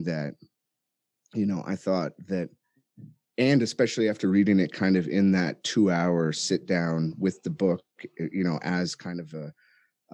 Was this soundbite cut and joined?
no; 0 cuts

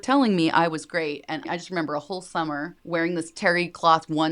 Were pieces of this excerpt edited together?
yes; 2 cuts; at 1.5 s, 2.8 s

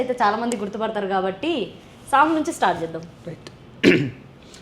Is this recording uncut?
yes; 0 cuts

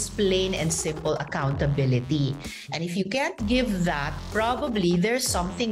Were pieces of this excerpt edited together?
yes; 1 cut; at 4.1 s

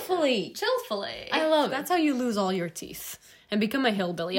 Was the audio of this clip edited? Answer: yes; 1 cut; at 1.8 s

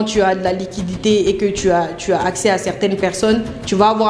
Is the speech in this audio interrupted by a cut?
no; 0 cuts

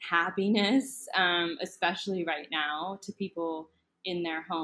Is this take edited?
no; 0 cuts

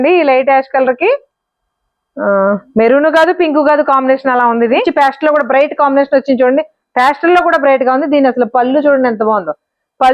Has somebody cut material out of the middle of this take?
yes; 1 cut; at 4.9 s

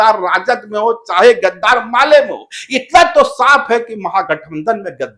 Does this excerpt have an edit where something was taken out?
no; 0 cuts

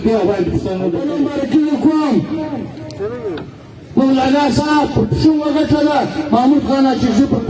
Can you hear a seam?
yes; 1 cut; at 1.2 s

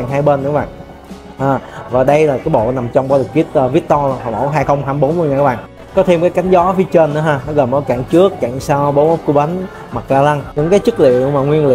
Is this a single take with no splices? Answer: yes; 0 cuts

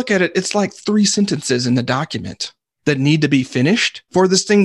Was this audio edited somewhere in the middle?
no; 0 cuts

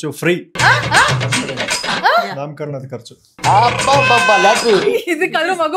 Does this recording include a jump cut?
no; 0 cuts

